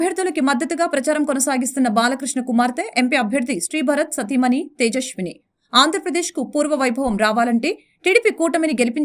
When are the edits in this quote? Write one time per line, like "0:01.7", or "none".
none